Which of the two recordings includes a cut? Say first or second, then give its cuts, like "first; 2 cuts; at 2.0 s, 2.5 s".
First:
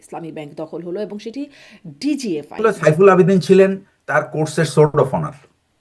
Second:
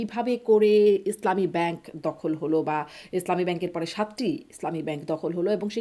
first; 1 cut; at 2.6 s